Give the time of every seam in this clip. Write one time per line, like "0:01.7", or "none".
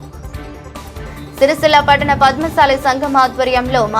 0:01.1